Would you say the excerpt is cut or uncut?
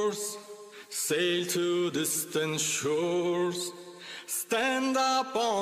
uncut